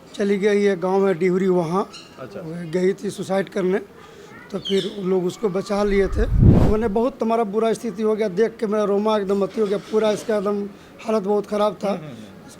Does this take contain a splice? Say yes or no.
yes